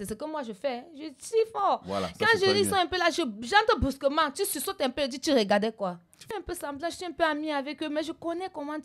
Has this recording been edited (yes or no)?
yes